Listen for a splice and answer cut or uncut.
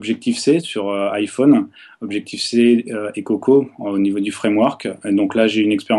uncut